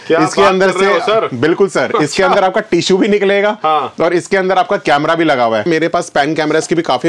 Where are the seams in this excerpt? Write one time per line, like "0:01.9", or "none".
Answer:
0:05.7